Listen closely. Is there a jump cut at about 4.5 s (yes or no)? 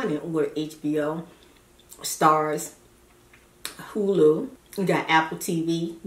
yes